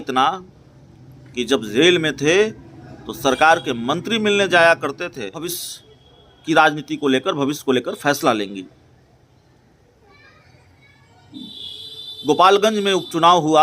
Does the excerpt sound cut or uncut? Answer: cut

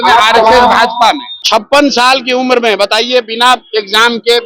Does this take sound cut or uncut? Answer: cut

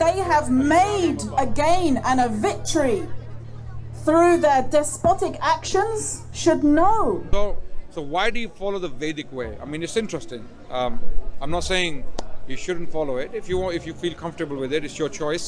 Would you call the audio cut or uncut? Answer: cut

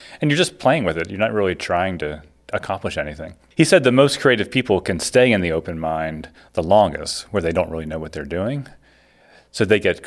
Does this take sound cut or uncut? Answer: uncut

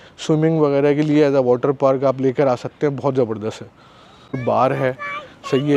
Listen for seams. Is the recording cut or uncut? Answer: cut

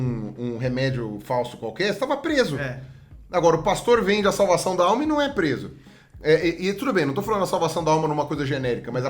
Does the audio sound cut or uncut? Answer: uncut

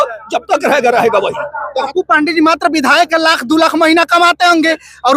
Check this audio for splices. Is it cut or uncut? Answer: cut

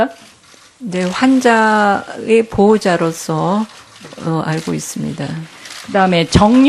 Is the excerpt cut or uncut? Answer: uncut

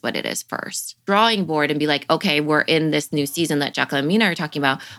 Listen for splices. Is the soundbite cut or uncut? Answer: cut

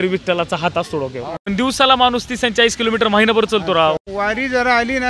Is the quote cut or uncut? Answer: cut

